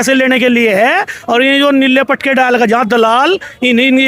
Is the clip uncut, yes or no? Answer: yes